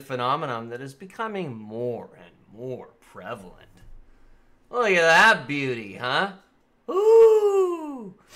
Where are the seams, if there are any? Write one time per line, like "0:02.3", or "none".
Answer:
0:03.5